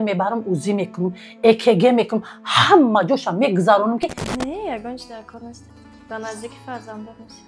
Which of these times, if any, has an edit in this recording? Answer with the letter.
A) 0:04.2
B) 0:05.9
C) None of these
A